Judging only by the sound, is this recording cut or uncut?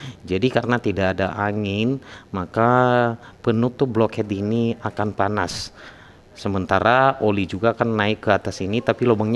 uncut